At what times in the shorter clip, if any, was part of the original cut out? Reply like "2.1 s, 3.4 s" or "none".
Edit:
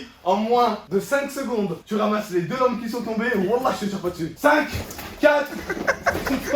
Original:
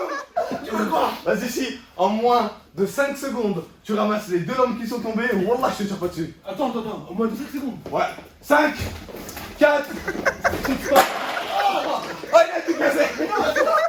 0.8 s, 1.8 s, 4.5 s